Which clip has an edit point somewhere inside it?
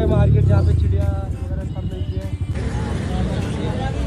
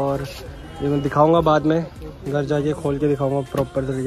first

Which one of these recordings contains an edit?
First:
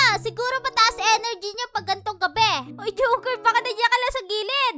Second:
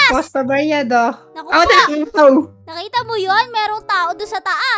first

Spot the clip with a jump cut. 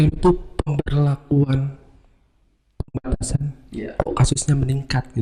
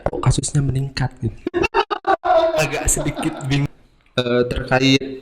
second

